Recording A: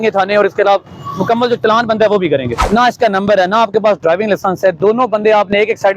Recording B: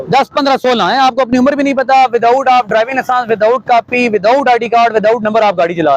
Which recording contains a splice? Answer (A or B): A